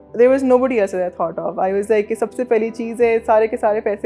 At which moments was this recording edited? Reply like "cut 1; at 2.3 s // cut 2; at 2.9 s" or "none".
none